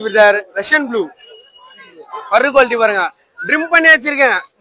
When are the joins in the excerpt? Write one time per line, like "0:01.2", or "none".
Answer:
none